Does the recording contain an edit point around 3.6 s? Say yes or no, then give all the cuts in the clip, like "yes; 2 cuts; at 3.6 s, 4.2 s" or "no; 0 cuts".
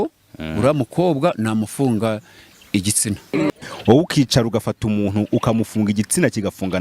yes; 1 cut; at 3.6 s